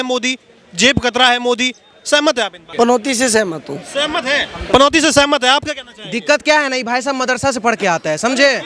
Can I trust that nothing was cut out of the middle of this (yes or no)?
no